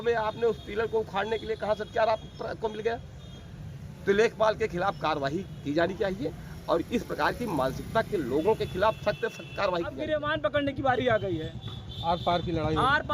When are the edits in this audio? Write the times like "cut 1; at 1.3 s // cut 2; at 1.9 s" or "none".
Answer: cut 1; at 10.0 s